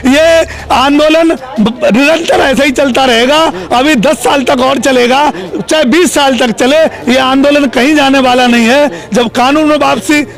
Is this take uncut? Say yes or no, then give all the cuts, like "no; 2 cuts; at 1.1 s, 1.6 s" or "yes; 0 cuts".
yes; 0 cuts